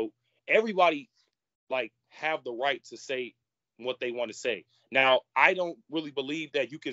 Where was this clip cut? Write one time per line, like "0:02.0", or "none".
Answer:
none